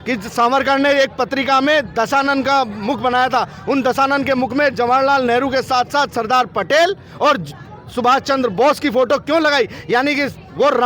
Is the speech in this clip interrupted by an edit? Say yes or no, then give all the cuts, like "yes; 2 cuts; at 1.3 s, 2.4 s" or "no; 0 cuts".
no; 0 cuts